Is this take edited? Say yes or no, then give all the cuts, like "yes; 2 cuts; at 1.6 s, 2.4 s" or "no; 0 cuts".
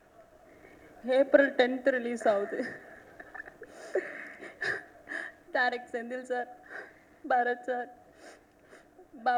no; 0 cuts